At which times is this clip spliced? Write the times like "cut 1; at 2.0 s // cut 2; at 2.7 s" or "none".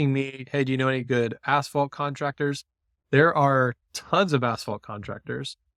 none

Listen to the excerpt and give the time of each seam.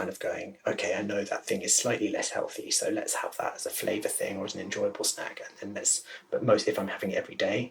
none

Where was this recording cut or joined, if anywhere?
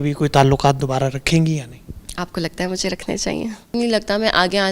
cut 1; at 3.7 s

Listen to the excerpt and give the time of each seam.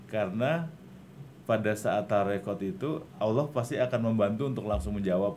none

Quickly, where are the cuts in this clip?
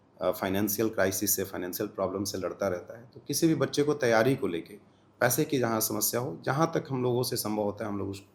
none

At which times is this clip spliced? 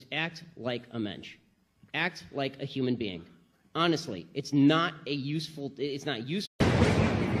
none

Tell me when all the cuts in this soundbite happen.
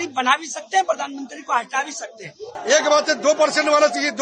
cut 1; at 2.5 s

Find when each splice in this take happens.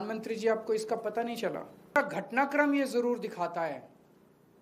cut 1; at 2.0 s

